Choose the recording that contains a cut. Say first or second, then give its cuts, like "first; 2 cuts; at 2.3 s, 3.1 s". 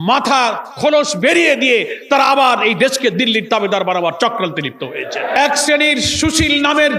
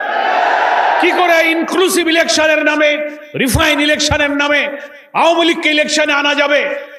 first; 1 cut; at 5.4 s